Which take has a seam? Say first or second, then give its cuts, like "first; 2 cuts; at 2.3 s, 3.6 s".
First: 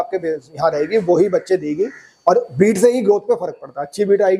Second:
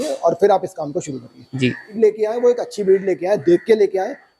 second; 1 cut; at 2.0 s